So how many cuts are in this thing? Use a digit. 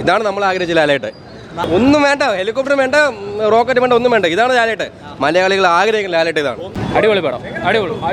0